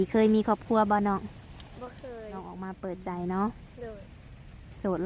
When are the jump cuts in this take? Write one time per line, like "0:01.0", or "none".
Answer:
0:02.5